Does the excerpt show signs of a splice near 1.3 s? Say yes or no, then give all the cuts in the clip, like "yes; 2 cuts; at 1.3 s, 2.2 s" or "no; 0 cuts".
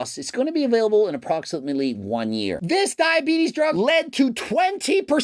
no; 2 cuts; at 2.6 s, 3.7 s